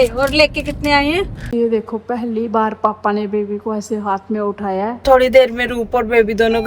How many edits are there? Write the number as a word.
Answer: two